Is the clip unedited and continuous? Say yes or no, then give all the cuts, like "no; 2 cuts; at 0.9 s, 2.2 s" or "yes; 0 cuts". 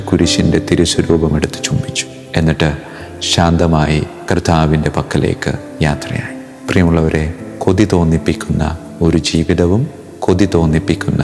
yes; 0 cuts